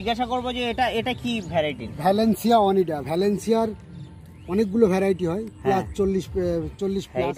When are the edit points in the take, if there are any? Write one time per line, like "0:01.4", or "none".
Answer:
none